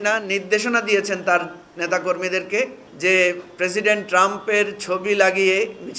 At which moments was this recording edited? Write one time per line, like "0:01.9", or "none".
0:02.8